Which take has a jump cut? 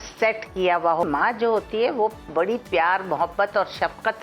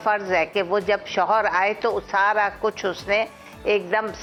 first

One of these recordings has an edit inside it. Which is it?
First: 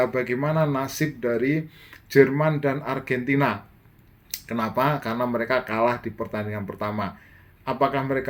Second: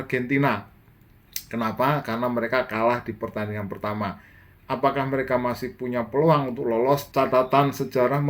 second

